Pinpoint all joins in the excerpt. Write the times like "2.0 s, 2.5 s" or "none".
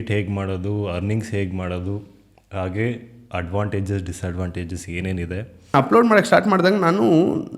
5.7 s

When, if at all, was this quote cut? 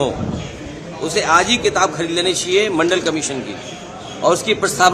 none

